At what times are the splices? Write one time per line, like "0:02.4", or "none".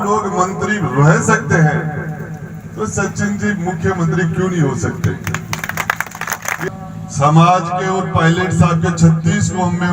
0:06.6